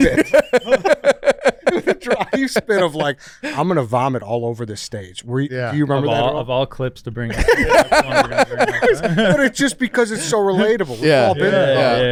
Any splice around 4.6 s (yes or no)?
no